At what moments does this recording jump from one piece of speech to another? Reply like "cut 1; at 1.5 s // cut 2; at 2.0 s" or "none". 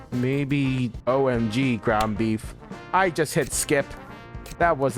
cut 1; at 0.9 s